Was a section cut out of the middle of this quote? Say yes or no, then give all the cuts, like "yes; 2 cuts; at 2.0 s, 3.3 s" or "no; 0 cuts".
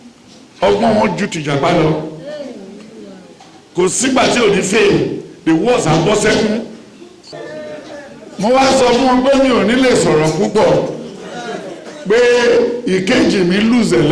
yes; 1 cut; at 7.3 s